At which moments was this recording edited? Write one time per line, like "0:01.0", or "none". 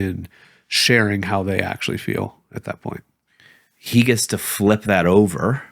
0:03.5